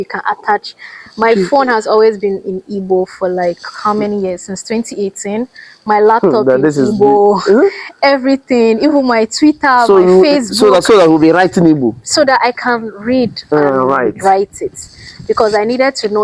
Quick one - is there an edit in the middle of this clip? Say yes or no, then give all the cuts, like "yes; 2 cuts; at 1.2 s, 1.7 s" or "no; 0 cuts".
no; 0 cuts